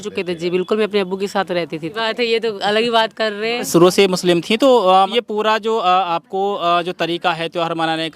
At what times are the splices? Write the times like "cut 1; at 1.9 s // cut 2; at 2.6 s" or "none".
cut 1; at 1.9 s // cut 2; at 3.7 s // cut 3; at 5.1 s

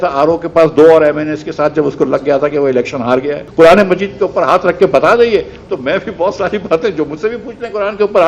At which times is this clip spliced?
cut 1; at 3.5 s

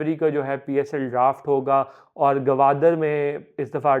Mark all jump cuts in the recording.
none

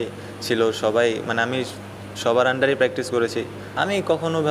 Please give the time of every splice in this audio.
cut 1; at 3.6 s

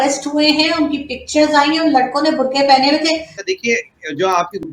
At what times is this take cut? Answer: cut 1; at 3.4 s

